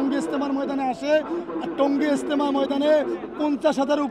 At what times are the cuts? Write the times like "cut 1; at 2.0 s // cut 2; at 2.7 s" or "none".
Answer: none